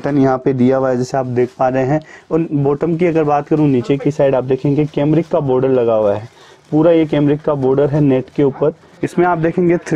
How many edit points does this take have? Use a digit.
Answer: 1